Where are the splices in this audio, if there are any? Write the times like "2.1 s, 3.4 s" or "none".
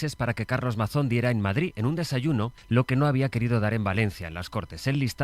2.6 s